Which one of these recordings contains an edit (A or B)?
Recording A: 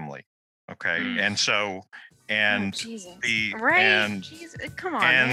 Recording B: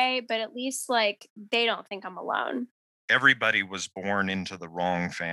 B